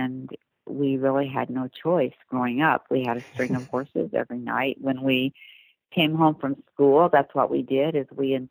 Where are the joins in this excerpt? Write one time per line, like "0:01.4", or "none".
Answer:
none